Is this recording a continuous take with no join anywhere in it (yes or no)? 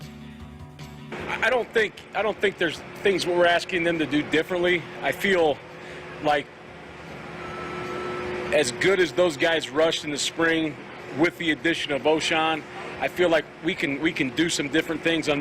no